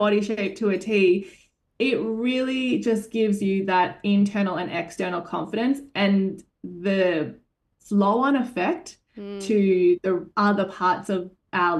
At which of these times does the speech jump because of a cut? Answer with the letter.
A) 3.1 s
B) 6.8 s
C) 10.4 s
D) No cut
D